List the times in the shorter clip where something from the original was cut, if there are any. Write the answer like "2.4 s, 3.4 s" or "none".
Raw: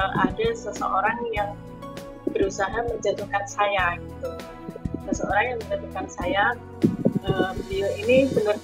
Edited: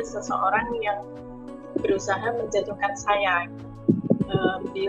3.7 s